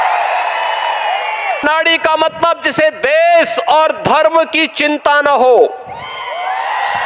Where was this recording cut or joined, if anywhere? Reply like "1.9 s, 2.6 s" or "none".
1.6 s